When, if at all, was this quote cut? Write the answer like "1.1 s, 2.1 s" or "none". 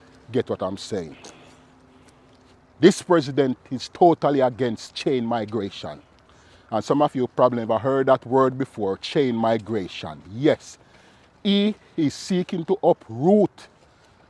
none

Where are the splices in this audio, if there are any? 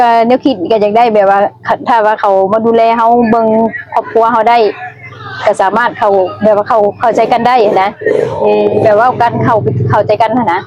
none

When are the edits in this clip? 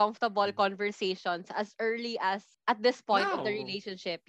2.5 s

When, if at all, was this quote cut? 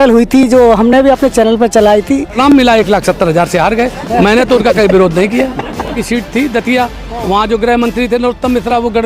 2.4 s, 6.0 s

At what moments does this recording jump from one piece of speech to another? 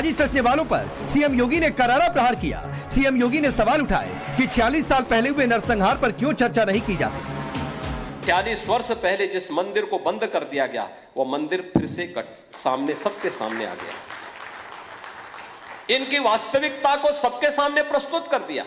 4.2 s

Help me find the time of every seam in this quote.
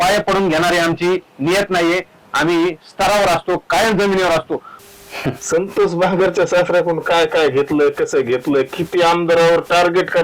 4.7 s

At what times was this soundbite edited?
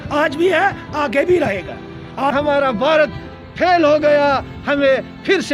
2.3 s

